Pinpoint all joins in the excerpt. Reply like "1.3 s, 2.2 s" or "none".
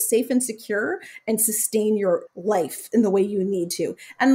2.3 s